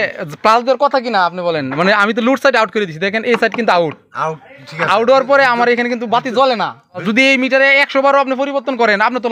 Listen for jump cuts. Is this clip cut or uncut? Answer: cut